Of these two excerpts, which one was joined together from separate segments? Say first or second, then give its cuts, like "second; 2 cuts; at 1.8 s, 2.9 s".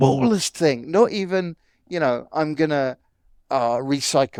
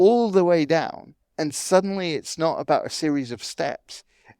second; 1 cut; at 1.3 s